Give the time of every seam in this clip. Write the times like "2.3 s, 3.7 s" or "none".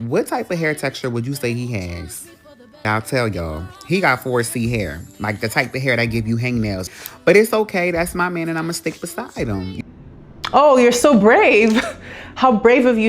2.8 s, 7.0 s, 9.8 s